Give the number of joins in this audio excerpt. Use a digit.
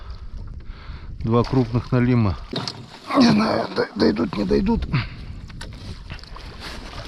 1